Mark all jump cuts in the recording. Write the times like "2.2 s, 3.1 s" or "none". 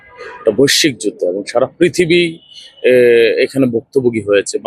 none